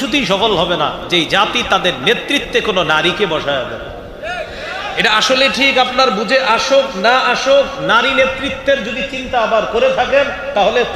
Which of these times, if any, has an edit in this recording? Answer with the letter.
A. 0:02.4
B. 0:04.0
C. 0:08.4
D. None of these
D